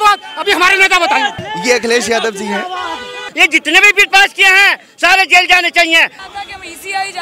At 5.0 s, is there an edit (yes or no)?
no